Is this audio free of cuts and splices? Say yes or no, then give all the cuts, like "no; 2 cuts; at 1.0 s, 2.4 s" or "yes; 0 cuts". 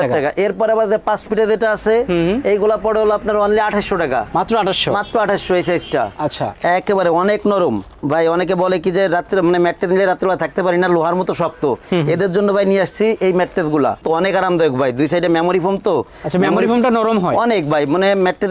no; 2 cuts; at 6.5 s, 14.0 s